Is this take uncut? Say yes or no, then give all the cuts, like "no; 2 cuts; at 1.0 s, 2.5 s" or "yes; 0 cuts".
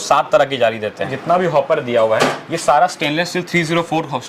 no; 1 cut; at 1.1 s